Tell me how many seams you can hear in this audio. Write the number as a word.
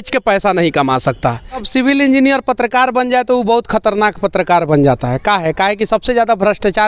one